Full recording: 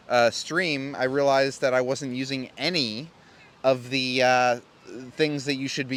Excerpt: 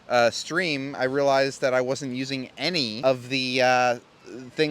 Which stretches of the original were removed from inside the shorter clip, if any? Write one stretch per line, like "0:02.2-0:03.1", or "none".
0:02.9-0:03.5